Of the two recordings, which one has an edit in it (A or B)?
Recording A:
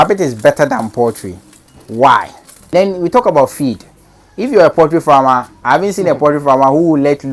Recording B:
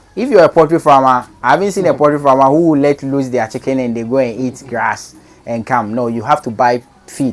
A